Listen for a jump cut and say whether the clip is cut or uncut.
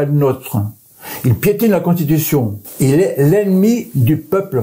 cut